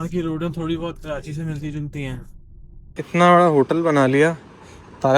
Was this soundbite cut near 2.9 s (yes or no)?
yes